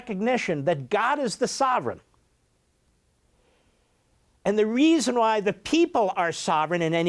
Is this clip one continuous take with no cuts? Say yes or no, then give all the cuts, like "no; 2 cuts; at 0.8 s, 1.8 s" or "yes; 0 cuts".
yes; 0 cuts